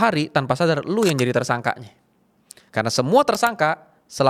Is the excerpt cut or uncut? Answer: uncut